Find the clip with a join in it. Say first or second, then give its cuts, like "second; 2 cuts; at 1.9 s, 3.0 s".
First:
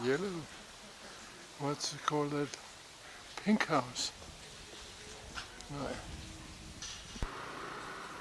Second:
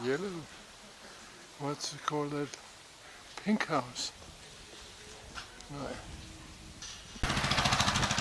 first; 1 cut; at 7.1 s